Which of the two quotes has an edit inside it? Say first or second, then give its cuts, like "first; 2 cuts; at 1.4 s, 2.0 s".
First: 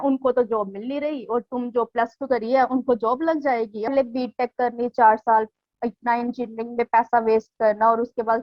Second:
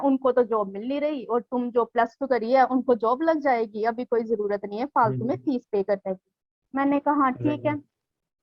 first; 1 cut; at 3.9 s